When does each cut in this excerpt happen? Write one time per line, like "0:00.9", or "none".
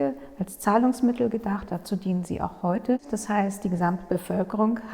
0:03.1